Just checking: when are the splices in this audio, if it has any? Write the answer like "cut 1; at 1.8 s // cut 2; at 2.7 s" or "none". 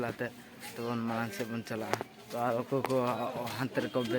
none